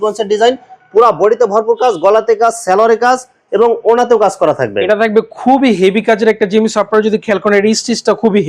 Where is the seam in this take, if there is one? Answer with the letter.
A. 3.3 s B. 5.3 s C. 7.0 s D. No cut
D